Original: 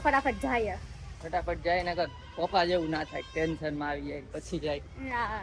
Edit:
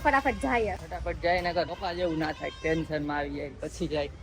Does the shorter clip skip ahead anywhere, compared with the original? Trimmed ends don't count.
yes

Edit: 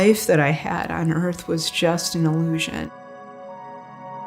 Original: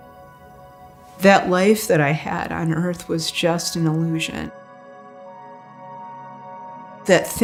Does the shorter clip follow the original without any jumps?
no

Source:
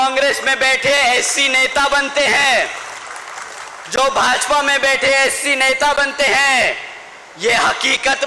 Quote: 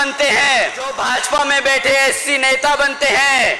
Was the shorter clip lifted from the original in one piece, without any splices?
no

